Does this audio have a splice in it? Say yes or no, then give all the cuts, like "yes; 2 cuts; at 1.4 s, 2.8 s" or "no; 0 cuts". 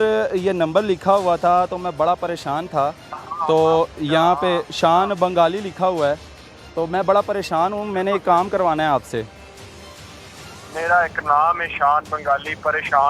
no; 0 cuts